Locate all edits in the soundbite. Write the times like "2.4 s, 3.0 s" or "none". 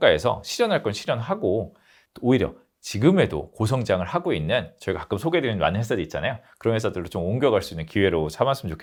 none